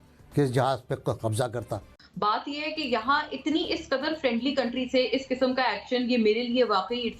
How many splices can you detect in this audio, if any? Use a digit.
1